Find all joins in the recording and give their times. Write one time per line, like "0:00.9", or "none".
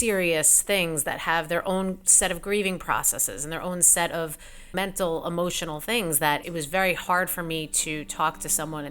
0:04.7
0:06.4